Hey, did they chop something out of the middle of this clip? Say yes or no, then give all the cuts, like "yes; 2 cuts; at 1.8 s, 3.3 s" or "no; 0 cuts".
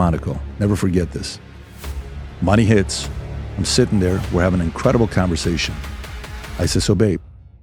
no; 0 cuts